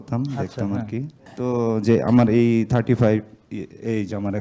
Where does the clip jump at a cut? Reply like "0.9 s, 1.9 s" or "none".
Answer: 1.2 s